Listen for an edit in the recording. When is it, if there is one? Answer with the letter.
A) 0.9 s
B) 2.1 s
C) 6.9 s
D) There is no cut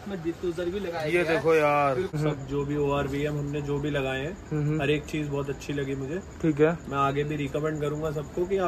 B